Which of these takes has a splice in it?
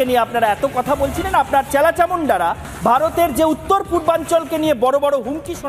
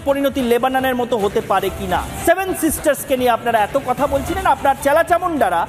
second; 1 cut; at 2.2 s

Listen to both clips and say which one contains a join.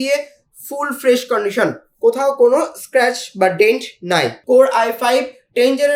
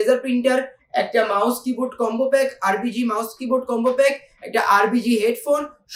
first; 1 cut; at 4.4 s

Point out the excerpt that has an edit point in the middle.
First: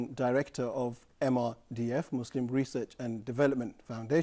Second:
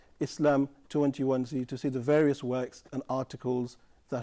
first; 1 cut; at 1.2 s

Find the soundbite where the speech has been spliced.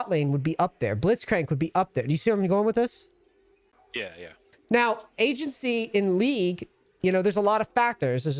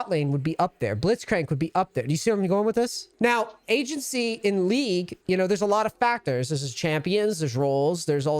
second; 2 cuts; at 3.0 s, 5.1 s

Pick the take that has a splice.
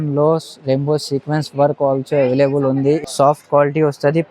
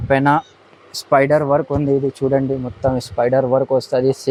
first; 1 cut; at 3.0 s

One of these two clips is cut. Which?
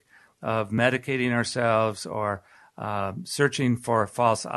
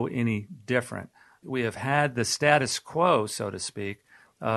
second; 1 cut; at 1.4 s

